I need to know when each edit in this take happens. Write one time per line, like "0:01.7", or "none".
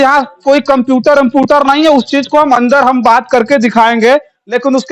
none